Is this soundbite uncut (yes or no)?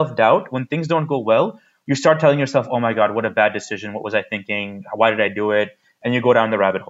yes